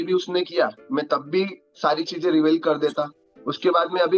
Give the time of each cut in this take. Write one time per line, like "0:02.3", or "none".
none